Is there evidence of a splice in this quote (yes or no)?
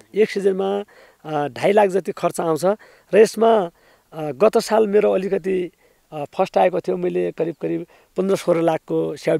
no